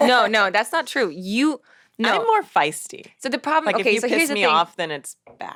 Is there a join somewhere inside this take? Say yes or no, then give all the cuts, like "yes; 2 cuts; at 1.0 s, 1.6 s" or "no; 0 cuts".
no; 0 cuts